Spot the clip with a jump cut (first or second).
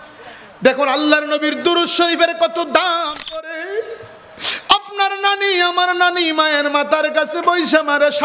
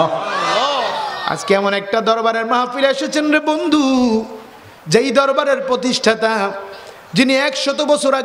first